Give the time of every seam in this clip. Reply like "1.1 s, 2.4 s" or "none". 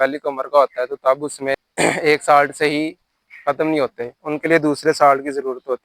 1.7 s